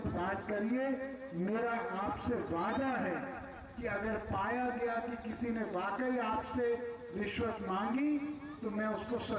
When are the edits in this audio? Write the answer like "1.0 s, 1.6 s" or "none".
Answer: none

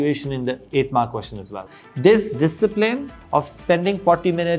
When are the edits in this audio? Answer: 1.7 s

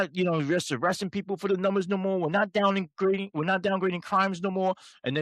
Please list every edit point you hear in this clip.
none

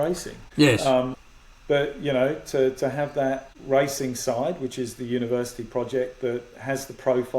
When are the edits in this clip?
0.7 s, 3.5 s

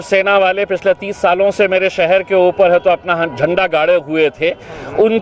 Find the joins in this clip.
none

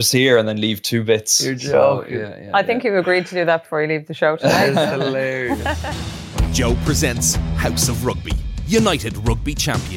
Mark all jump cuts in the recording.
5.9 s

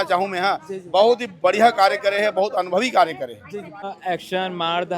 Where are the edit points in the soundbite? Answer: 3.8 s

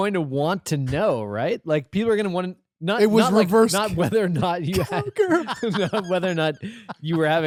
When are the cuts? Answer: none

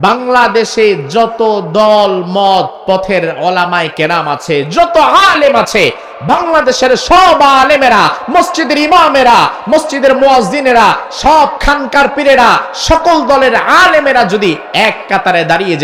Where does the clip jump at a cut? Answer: none

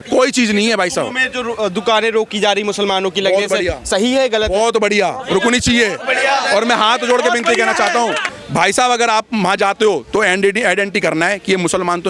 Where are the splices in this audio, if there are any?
none

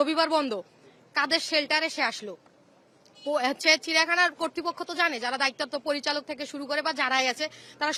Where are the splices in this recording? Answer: none

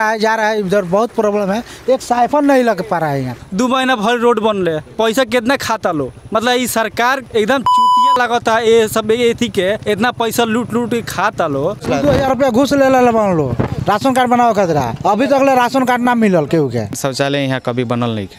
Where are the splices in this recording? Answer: 3.3 s, 11.8 s, 17.0 s

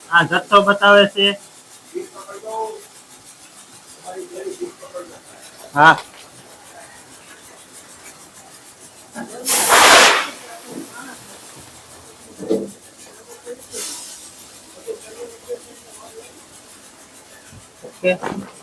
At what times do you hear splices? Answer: none

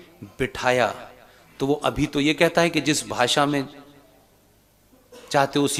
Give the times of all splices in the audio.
none

